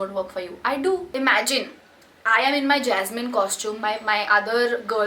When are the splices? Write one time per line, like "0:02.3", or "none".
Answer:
0:01.1